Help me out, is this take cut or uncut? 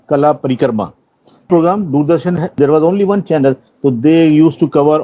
cut